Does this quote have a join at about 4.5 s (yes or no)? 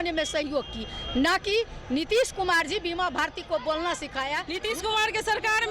yes